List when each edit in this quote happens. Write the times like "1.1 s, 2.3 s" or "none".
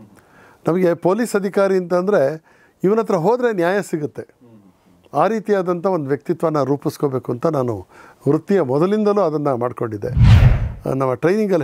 10.4 s